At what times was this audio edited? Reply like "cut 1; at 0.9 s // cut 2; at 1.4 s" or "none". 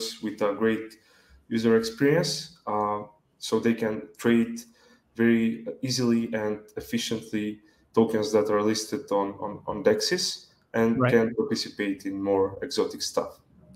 none